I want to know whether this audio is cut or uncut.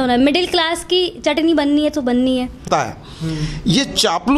cut